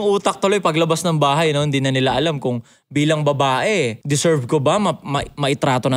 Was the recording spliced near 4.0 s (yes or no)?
yes